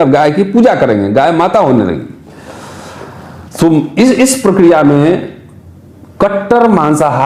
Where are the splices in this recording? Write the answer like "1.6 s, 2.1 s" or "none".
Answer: none